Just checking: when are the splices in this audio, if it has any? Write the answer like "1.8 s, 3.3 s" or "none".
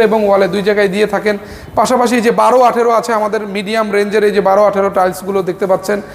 none